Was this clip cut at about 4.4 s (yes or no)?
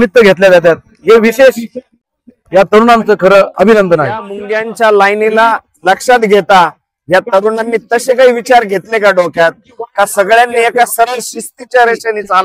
yes